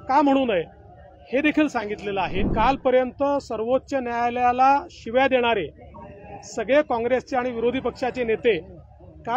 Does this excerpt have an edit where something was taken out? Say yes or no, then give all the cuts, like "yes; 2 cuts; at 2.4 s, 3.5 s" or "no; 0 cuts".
yes; 1 cut; at 2.4 s